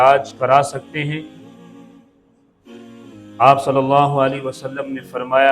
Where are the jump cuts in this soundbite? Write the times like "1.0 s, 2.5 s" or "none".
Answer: 1.3 s, 2.7 s